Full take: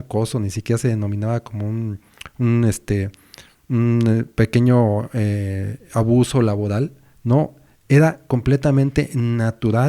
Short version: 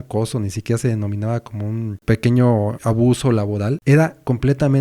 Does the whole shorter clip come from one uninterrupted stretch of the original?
no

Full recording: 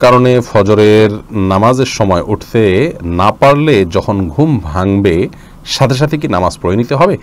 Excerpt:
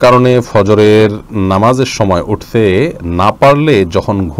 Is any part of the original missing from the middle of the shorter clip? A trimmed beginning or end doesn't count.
no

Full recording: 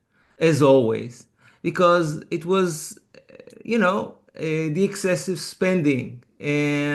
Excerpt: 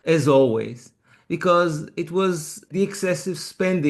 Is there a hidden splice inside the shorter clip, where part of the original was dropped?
yes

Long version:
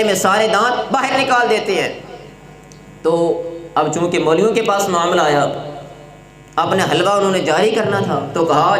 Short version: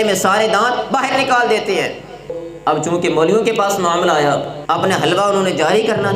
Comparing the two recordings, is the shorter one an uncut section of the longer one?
no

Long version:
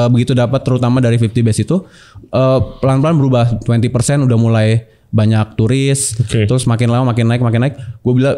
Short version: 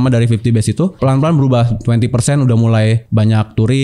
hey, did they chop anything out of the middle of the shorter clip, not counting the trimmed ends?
yes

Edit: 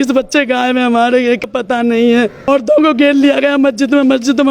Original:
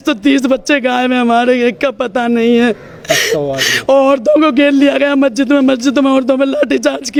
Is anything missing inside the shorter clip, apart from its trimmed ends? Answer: yes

